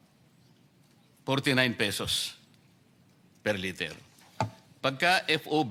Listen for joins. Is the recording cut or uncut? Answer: uncut